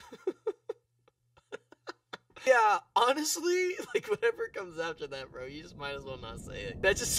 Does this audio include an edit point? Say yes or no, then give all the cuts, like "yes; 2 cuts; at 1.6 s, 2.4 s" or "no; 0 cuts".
no; 0 cuts